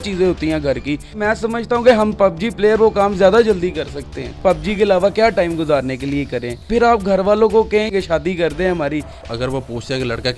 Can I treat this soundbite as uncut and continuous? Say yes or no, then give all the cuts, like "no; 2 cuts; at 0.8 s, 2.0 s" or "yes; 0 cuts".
no; 5 cuts; at 1.2 s, 4.3 s, 6.6 s, 7.9 s, 9.2 s